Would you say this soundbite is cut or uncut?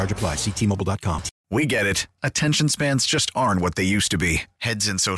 cut